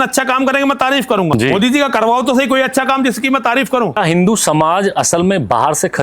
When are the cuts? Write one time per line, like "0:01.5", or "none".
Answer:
0:01.3
0:04.0